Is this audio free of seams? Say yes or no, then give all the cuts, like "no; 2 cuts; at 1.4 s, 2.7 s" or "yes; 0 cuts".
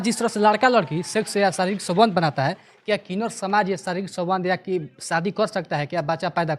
yes; 0 cuts